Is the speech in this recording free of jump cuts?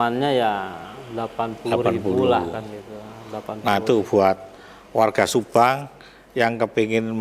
yes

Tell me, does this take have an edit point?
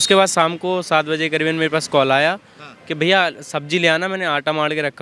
no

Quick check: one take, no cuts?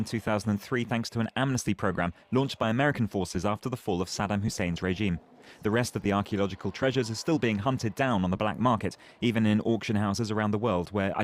yes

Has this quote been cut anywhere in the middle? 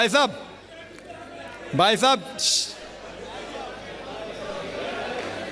no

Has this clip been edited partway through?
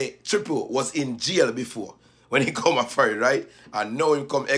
no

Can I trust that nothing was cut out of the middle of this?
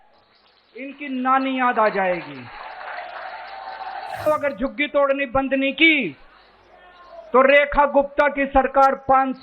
no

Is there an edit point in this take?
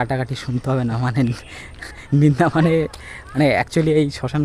no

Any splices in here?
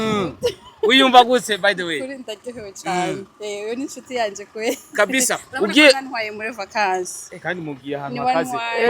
no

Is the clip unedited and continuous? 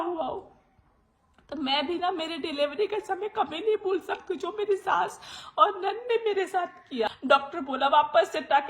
no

